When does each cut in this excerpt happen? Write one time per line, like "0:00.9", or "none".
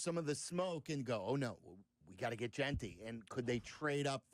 none